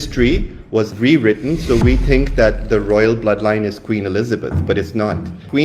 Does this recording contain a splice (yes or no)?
yes